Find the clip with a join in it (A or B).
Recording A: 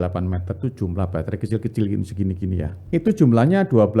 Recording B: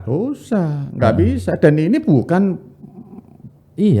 A